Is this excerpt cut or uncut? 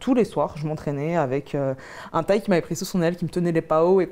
uncut